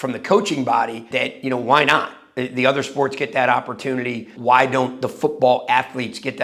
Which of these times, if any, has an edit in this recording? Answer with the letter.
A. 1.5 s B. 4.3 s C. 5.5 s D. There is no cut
B